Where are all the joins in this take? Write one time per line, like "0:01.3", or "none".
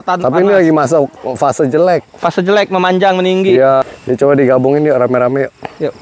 0:03.9